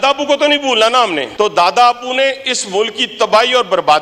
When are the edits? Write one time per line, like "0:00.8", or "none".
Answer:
0:01.3

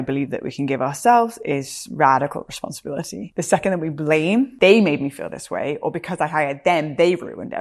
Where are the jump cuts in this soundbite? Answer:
0:03.2
0:04.5

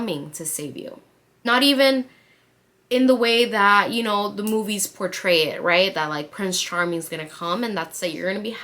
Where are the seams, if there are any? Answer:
0:01.2

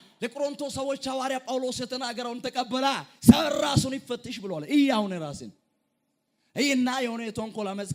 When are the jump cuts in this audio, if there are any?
none

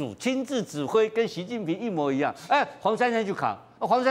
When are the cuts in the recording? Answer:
none

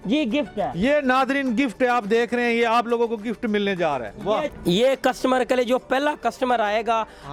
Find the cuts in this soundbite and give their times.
none

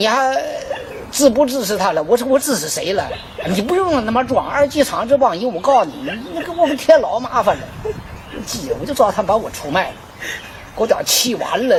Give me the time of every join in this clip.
none

